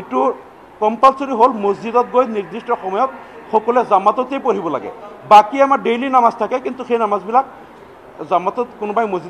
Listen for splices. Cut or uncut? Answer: uncut